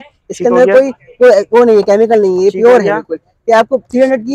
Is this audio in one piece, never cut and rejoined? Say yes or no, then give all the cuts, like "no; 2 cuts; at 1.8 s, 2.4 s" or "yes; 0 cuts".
yes; 0 cuts